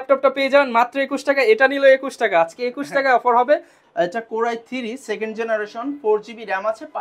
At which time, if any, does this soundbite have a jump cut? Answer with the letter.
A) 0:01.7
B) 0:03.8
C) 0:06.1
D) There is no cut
B